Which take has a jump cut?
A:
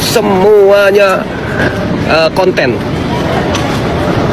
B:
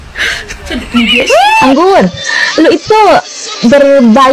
B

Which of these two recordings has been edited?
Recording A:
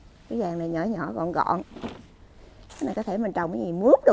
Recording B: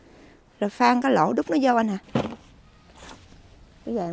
B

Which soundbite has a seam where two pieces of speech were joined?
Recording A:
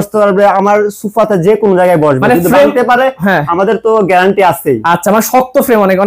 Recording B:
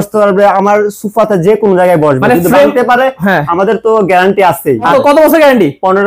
B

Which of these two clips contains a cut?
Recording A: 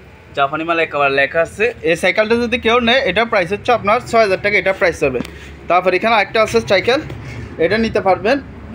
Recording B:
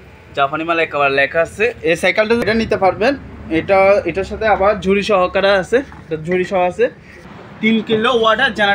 B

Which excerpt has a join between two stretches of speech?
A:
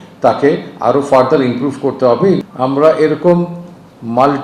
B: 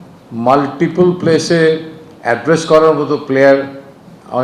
A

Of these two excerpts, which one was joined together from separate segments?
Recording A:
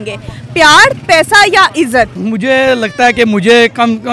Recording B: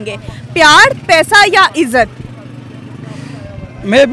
A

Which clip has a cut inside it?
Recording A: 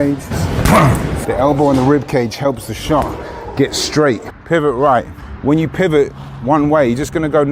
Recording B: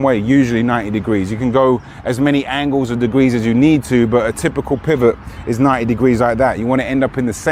A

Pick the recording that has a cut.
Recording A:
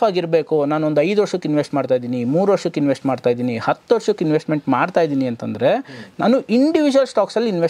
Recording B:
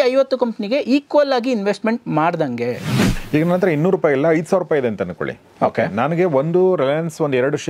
B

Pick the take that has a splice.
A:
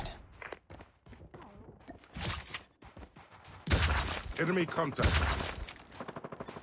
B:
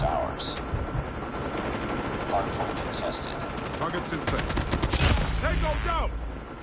B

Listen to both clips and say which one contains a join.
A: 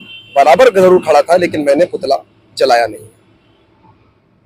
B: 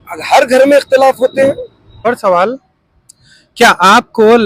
B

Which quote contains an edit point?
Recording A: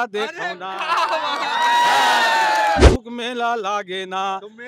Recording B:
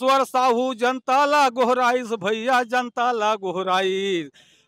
A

